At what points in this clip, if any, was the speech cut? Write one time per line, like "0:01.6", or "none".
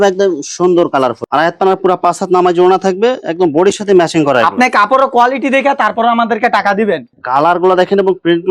0:01.2
0:07.1